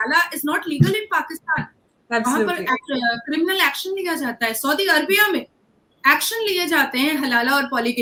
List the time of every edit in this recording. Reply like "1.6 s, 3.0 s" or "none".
none